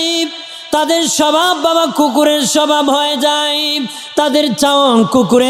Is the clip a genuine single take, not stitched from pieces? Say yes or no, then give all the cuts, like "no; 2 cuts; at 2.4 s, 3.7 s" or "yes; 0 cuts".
yes; 0 cuts